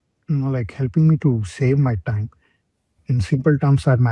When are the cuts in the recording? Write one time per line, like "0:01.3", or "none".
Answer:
0:03.0